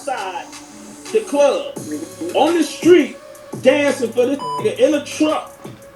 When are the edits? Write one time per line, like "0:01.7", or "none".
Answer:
none